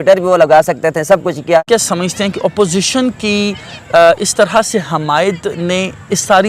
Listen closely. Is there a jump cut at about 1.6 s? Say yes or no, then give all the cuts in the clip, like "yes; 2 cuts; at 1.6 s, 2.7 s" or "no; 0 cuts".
yes; 1 cut; at 1.6 s